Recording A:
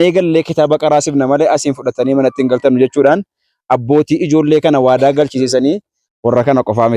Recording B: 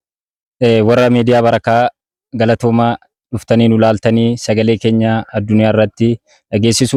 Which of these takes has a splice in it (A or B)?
A